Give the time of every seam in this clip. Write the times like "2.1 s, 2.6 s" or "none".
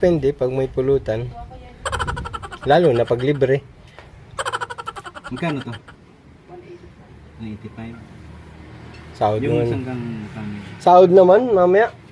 none